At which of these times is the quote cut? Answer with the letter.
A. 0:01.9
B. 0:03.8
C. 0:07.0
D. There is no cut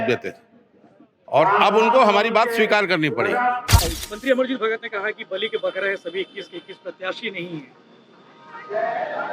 B